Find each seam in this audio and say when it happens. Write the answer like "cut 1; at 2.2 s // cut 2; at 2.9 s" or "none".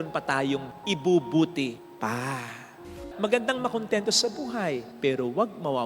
cut 1; at 3.0 s